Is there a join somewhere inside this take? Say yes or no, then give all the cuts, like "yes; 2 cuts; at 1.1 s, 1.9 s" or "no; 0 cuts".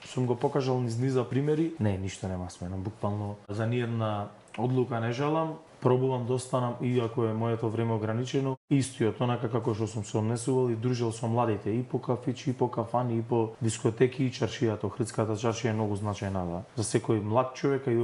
yes; 6 cuts; at 1.5 s, 3.5 s, 5.6 s, 8.6 s, 13.6 s, 16.7 s